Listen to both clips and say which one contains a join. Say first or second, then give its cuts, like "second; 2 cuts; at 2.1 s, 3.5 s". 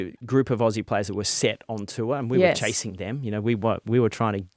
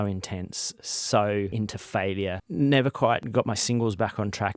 second; 2 cuts; at 2.1 s, 3.2 s